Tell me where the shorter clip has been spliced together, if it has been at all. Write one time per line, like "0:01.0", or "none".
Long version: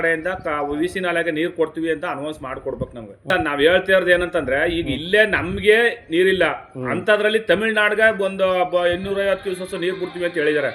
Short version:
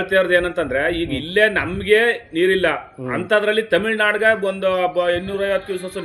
none